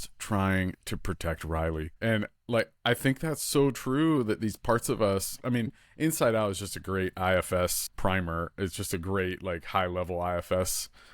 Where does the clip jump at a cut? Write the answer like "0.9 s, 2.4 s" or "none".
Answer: 1.9 s, 7.9 s